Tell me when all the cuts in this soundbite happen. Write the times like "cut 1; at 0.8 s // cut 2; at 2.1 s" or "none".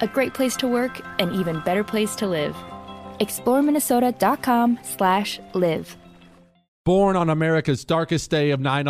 none